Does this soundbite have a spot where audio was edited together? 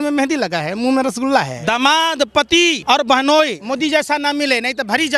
yes; 3 cuts; at 1.6 s, 2.8 s, 3.6 s

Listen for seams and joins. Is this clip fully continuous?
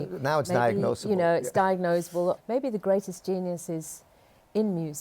no; 1 cut; at 2.4 s

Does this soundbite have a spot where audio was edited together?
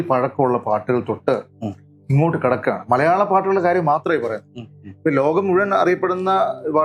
no; 0 cuts

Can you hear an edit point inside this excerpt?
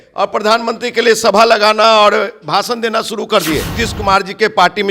yes; 1 cut; at 3.8 s

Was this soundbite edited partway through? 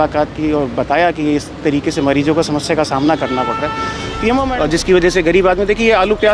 yes; 1 cut; at 4.5 s

